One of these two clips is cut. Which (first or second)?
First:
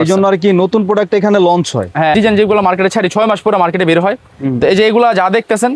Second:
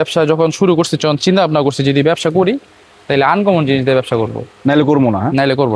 first